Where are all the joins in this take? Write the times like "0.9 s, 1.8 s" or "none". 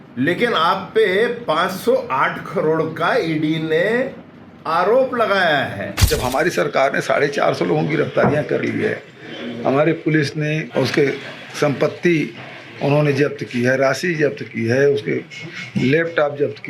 6.0 s